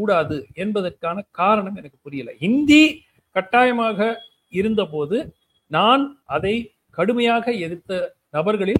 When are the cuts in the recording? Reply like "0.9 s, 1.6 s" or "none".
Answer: 6.2 s